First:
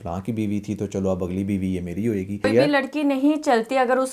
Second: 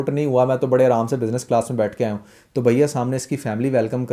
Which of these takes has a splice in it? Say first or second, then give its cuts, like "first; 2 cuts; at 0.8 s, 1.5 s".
first; 1 cut; at 2.4 s